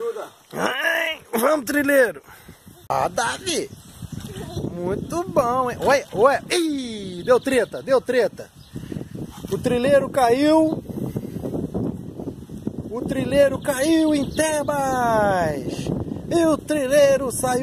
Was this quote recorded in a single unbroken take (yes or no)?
no